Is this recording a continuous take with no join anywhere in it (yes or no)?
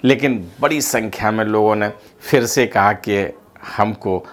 yes